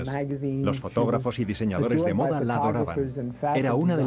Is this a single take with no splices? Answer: yes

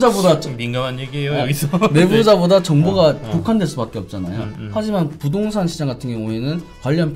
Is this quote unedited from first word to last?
yes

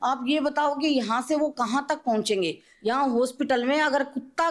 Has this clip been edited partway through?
yes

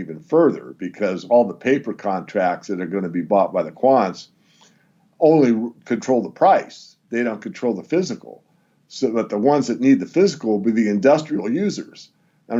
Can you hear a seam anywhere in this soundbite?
no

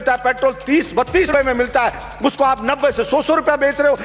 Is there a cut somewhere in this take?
yes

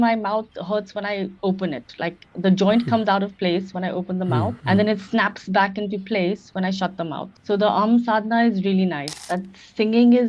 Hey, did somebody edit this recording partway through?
yes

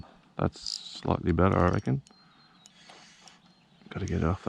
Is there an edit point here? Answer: no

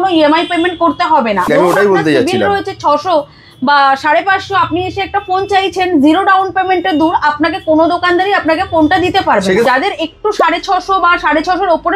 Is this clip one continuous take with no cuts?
no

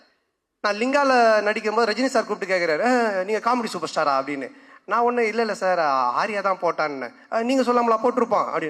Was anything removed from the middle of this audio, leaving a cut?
no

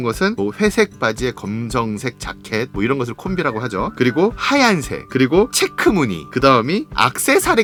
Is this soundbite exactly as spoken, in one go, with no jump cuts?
yes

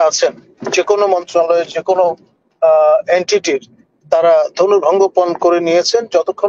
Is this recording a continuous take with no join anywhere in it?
yes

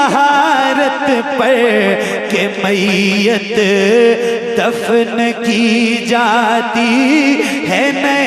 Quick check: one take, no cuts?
yes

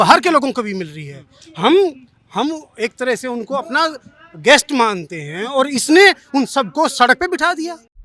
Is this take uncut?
yes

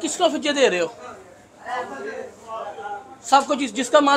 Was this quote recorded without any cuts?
yes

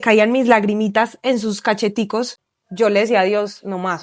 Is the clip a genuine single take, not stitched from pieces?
yes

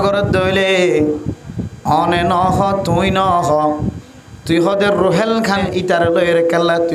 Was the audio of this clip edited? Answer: yes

